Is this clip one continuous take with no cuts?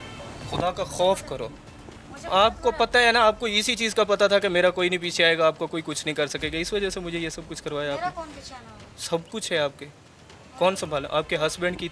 yes; 0 cuts

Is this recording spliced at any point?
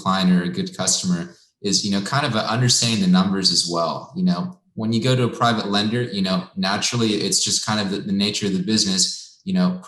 no; 0 cuts

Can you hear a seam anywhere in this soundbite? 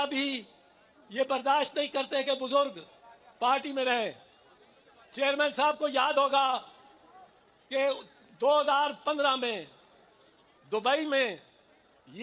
no; 0 cuts

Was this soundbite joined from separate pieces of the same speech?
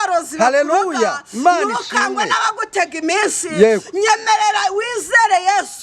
no; 0 cuts

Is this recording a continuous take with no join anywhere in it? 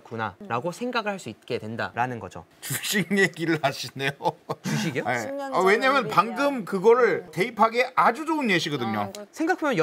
no; 1 cut; at 2.4 s

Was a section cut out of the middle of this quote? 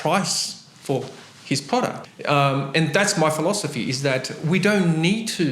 yes; 1 cut; at 2.0 s

